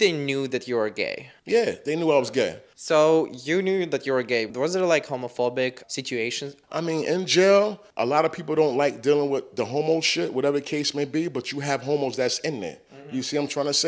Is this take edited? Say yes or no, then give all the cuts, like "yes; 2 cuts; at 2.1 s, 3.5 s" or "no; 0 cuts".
no; 0 cuts